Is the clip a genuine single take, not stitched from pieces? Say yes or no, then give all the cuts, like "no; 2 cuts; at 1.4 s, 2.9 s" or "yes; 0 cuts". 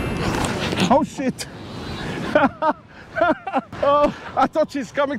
no; 2 cuts; at 3.7 s, 4.2 s